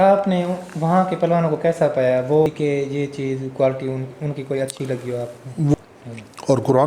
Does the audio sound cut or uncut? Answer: cut